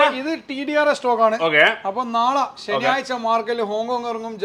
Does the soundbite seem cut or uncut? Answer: uncut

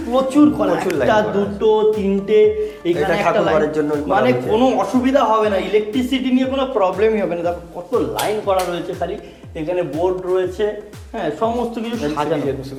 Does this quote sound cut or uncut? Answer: uncut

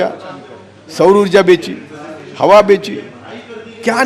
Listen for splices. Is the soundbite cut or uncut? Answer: uncut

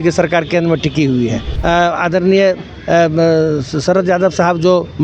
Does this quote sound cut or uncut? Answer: cut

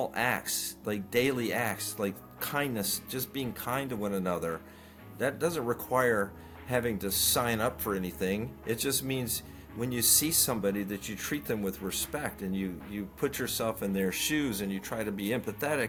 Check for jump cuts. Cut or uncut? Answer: uncut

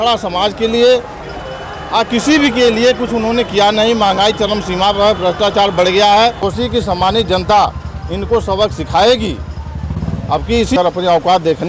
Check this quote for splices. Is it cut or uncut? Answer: cut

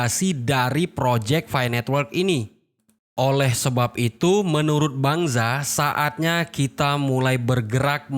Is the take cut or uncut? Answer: uncut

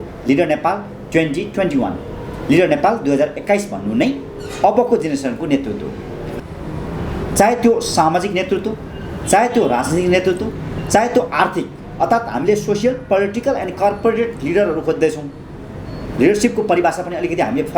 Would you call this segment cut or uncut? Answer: cut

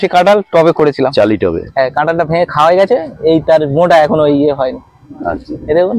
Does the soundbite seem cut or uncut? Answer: uncut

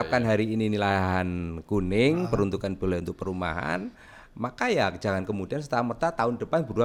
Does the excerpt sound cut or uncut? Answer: uncut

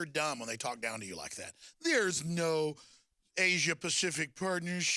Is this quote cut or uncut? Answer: uncut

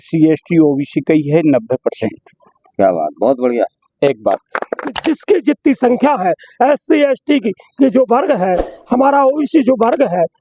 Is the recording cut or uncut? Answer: cut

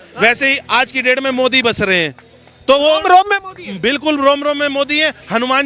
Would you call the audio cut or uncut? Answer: uncut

